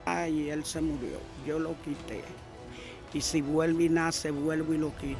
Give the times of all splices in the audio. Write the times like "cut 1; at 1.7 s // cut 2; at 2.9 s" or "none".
cut 1; at 1.3 s

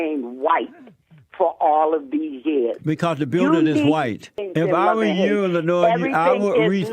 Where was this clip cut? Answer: cut 1; at 4.5 s

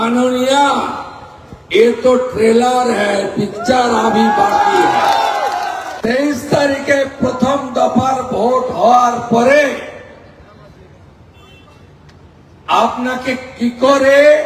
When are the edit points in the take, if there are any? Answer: cut 1; at 5.9 s

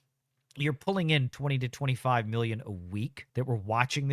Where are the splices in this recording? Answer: cut 1; at 1.3 s // cut 2; at 3.2 s

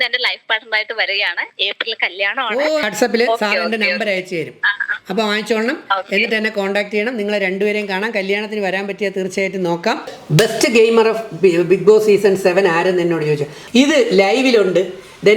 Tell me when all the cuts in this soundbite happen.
cut 1; at 2.8 s // cut 2; at 10.1 s // cut 3; at 13.6 s

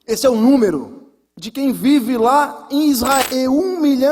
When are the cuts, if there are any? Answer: cut 1; at 3.2 s

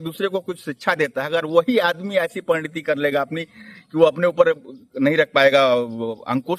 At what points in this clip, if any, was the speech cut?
none

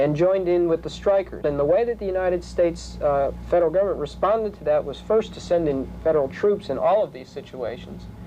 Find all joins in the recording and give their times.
cut 1; at 1.4 s

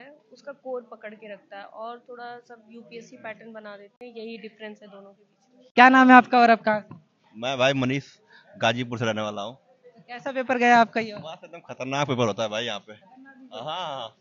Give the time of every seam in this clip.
none

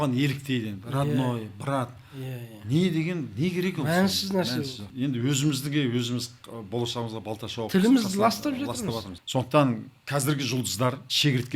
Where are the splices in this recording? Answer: cut 1; at 4.9 s // cut 2; at 9.1 s

